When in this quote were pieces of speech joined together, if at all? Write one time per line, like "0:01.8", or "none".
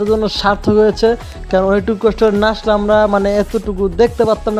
none